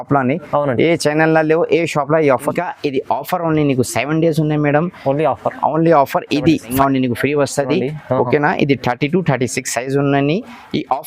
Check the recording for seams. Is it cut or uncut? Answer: cut